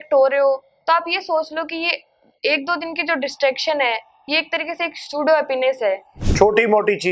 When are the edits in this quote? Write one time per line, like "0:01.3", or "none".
0:06.2